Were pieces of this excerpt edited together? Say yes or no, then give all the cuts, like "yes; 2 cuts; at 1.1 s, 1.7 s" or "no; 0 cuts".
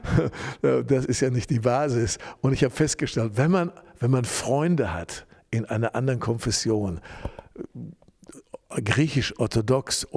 no; 0 cuts